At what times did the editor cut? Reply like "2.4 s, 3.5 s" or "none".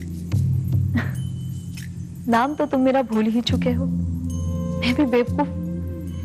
4.7 s